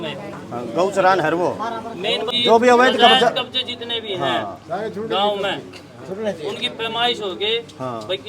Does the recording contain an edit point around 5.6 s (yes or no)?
no